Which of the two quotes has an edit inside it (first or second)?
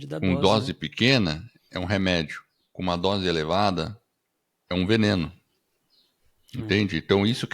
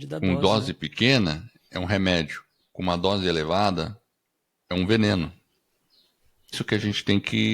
second